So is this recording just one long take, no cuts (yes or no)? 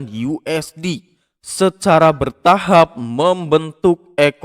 yes